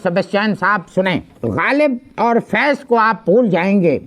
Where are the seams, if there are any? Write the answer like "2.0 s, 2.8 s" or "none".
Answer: 1.3 s